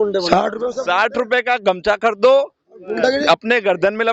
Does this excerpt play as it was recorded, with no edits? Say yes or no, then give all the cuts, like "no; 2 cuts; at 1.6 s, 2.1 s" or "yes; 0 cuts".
yes; 0 cuts